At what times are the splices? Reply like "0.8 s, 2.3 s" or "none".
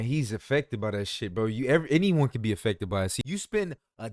3.2 s